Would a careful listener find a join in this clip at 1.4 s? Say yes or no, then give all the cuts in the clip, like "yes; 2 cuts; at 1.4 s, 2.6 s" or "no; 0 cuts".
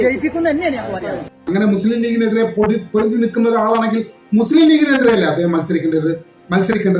yes; 1 cut; at 1.4 s